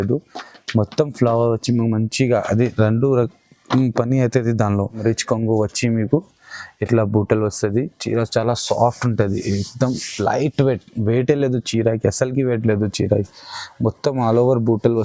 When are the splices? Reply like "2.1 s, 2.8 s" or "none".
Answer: 5.0 s